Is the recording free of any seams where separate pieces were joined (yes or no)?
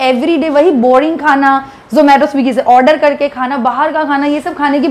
yes